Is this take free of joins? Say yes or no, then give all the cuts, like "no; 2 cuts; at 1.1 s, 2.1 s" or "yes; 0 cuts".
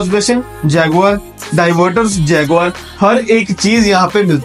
yes; 0 cuts